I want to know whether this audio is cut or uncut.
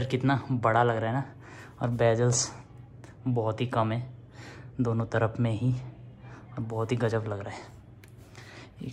uncut